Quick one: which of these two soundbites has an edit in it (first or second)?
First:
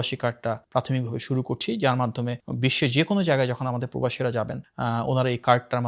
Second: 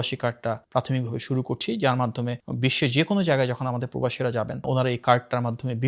second